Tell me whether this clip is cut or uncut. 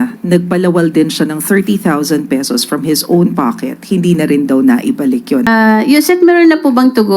cut